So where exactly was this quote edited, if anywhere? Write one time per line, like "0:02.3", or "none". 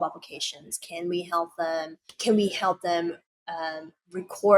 0:02.1